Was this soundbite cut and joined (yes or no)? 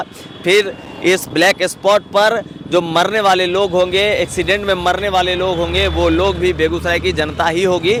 no